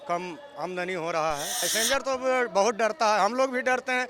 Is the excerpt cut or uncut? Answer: cut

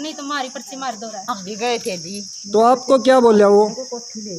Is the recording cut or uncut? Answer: cut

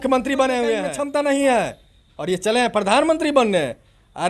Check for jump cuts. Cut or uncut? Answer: cut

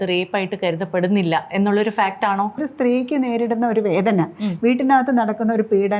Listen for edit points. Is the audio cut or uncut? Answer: cut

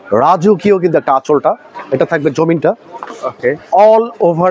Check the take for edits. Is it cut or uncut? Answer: cut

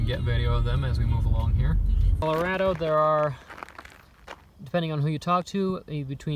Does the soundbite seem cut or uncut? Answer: cut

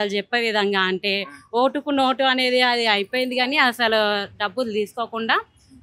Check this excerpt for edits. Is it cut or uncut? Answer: uncut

